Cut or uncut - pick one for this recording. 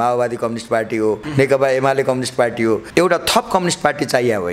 cut